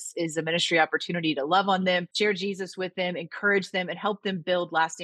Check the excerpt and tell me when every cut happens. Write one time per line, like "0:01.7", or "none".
0:02.1